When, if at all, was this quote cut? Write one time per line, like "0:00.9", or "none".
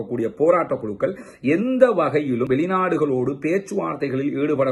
none

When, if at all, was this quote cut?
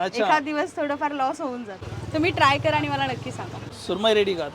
0:01.7
0:03.7

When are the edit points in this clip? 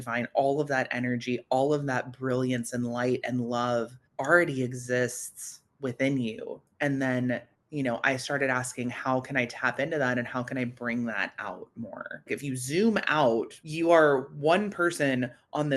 0:12.3
0:13.6

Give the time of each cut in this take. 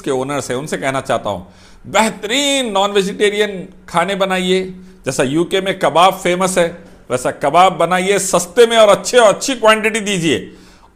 none

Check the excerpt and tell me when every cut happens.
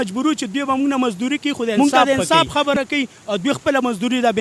0:01.8

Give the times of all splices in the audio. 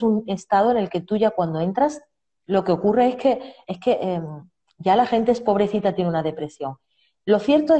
none

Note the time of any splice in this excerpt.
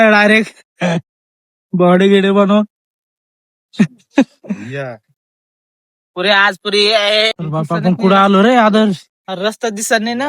0:07.3

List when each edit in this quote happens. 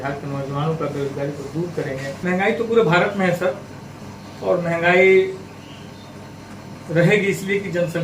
0:02.1

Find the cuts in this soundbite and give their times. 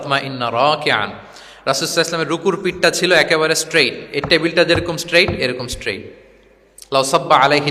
none

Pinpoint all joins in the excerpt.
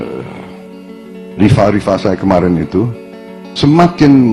0:01.1

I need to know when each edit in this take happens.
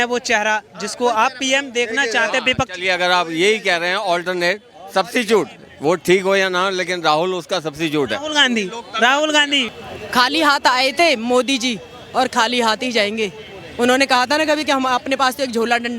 0:09.7

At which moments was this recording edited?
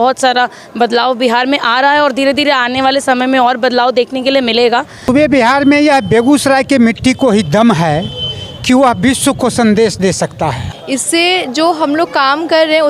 0:05.1
0:10.4

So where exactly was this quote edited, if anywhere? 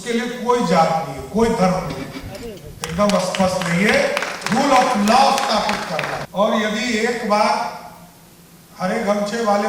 0:06.2

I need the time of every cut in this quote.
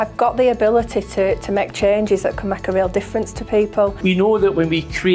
0:03.9

